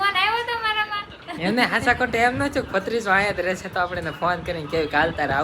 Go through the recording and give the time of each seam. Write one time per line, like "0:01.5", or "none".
0:01.2